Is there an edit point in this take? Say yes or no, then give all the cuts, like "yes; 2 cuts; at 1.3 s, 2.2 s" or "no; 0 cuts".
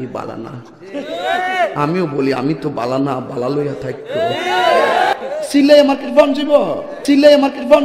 yes; 1 cut; at 5.1 s